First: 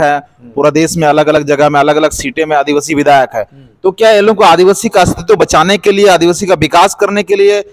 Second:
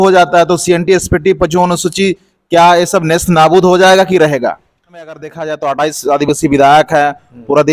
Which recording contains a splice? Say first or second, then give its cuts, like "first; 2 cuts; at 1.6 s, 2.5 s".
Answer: second; 1 cut; at 5.3 s